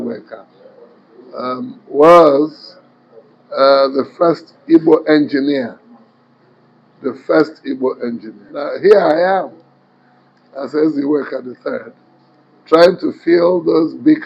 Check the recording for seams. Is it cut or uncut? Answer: cut